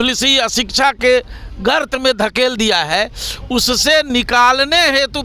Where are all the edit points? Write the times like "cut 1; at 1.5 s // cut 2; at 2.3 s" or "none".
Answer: none